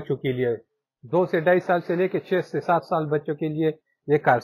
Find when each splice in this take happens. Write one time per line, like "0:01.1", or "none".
none